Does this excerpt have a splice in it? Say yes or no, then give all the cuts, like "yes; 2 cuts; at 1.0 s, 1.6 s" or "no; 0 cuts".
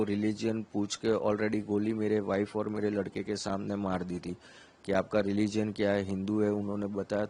no; 0 cuts